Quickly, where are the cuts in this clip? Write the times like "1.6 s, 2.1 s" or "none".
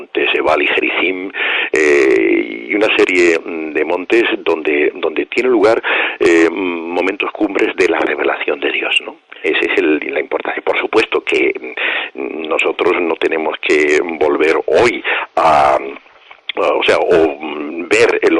none